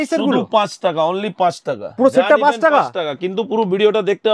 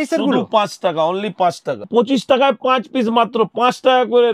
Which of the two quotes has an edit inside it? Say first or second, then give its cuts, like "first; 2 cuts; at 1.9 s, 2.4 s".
second; 1 cut; at 1.8 s